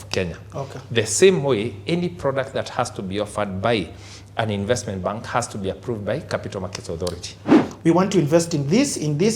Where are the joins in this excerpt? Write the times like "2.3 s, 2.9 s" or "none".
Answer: 7.6 s

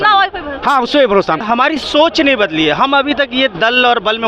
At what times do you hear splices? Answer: 1.4 s

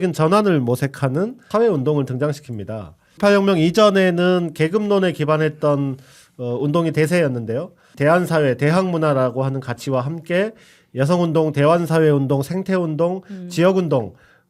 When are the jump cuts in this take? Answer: 1.4 s, 3.2 s, 7.9 s

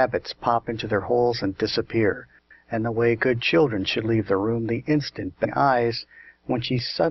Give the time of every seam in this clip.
none

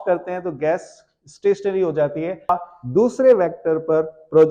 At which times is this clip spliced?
2.5 s

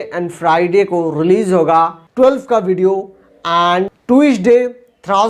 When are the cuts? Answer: 2.0 s, 4.0 s

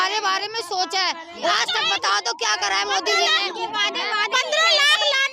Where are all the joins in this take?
1.5 s

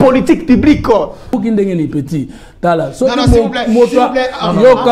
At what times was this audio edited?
1.4 s

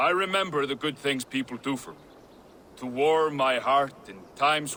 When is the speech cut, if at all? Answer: none

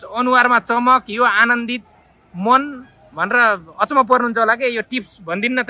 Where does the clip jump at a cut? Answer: none

